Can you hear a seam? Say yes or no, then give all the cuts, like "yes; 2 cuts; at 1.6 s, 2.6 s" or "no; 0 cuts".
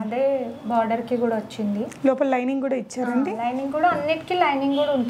no; 0 cuts